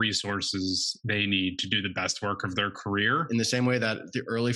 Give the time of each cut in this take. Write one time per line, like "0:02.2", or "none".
0:03.3